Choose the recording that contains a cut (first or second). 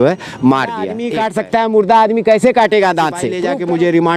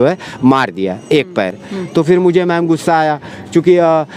first